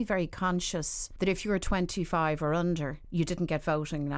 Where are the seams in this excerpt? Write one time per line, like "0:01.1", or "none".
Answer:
0:01.0
0:03.0